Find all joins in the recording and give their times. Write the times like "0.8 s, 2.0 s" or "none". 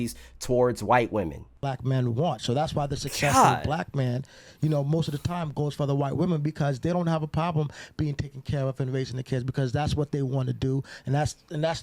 1.5 s